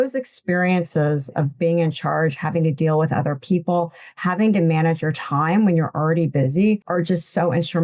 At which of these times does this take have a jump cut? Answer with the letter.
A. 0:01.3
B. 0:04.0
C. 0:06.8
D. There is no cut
C